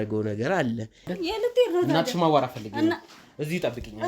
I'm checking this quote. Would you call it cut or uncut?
cut